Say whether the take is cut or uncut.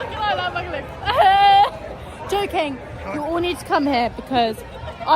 cut